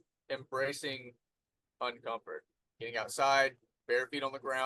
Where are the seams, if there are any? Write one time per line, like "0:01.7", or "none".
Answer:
0:02.6